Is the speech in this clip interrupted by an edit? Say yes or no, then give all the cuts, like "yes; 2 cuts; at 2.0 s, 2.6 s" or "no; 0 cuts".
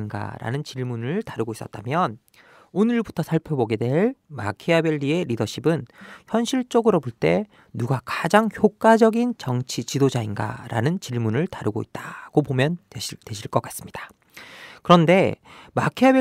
no; 0 cuts